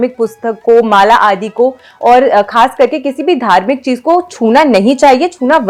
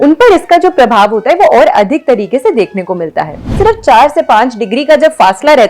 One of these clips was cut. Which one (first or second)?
second